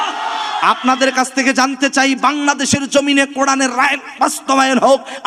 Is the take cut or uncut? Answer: uncut